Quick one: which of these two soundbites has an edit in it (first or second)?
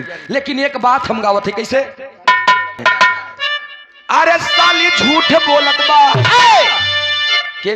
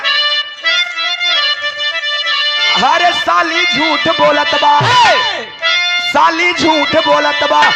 first